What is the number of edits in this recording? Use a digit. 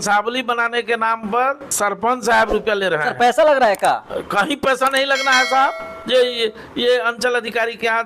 2